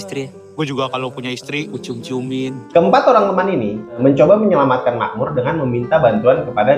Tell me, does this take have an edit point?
yes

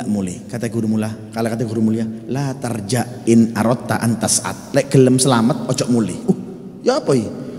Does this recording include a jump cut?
no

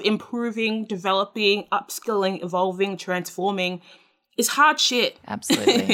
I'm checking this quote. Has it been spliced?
no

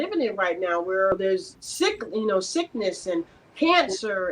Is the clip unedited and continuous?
no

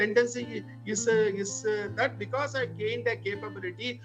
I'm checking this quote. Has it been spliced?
no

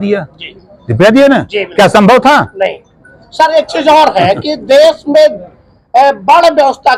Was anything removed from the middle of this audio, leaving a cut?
no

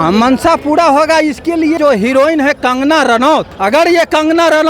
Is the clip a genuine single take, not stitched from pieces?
no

